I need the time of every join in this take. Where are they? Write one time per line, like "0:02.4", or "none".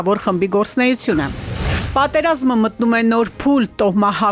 0:01.7